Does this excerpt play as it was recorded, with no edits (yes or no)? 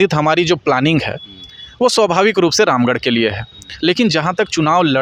yes